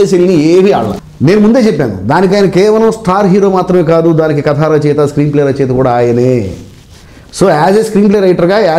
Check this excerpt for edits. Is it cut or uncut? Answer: cut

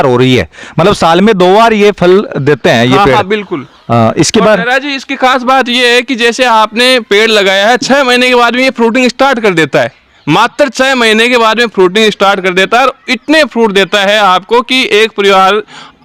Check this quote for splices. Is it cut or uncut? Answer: uncut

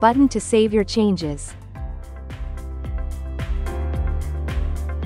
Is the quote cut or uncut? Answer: cut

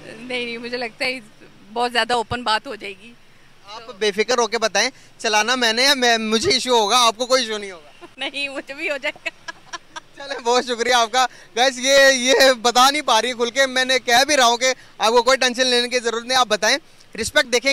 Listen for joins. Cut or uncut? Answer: uncut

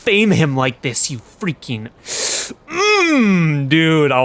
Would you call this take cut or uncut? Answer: uncut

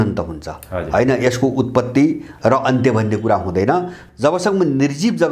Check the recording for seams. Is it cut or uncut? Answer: cut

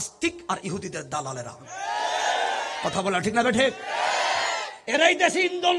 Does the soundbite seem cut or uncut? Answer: uncut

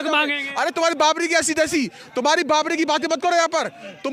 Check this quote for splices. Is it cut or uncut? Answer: uncut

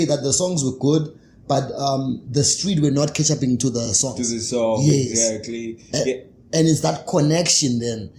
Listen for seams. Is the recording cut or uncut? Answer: uncut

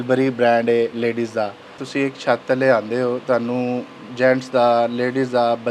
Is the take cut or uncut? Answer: cut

